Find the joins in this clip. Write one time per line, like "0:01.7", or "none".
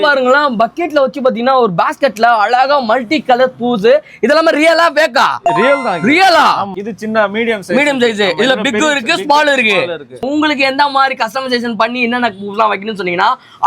0:06.7
0:10.2